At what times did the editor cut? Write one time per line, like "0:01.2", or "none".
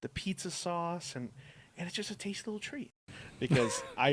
0:02.9